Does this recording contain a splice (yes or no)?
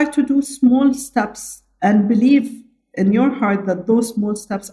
no